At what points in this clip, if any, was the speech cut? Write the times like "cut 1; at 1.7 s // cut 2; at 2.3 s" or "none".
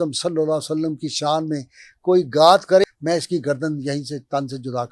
cut 1; at 2.8 s